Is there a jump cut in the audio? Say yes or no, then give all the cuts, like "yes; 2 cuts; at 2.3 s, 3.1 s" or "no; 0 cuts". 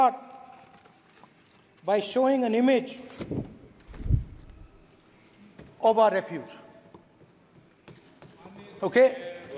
no; 0 cuts